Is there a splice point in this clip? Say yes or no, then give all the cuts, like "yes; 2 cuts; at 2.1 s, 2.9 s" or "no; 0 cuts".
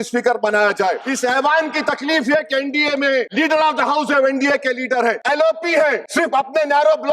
yes; 4 cuts; at 1.1 s, 3.3 s, 5.2 s, 6.0 s